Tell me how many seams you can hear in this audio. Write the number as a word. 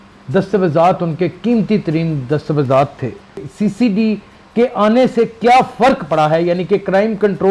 one